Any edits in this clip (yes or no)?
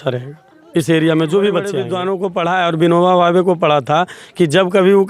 yes